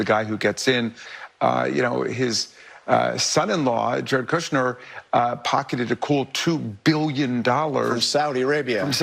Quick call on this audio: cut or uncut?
cut